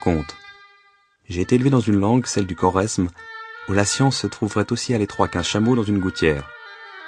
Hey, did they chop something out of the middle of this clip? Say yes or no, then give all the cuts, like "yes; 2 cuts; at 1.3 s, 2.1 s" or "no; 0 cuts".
yes; 1 cut; at 1.9 s